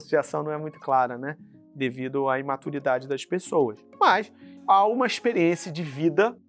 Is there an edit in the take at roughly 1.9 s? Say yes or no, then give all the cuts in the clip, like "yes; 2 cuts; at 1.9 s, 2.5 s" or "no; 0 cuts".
no; 1 cut; at 4.2 s